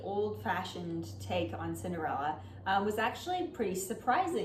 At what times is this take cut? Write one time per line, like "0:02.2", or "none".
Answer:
none